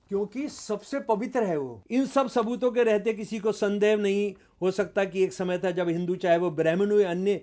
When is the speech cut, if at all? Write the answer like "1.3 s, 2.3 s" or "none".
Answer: 1.8 s